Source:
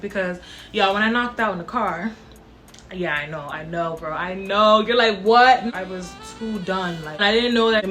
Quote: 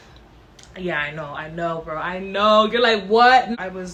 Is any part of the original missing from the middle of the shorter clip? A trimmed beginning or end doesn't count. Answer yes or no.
no